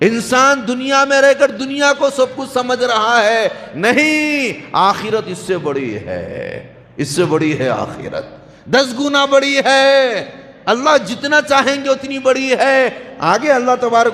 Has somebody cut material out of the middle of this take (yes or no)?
no